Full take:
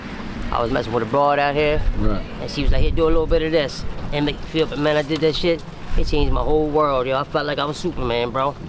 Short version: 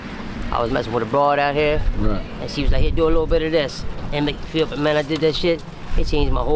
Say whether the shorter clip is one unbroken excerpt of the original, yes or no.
yes